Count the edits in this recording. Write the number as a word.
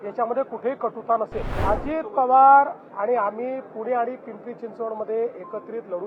one